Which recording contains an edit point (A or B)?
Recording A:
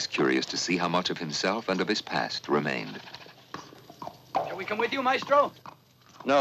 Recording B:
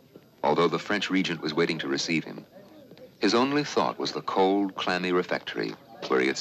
A